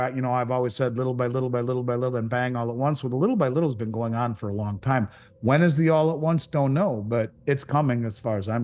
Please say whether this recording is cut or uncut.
uncut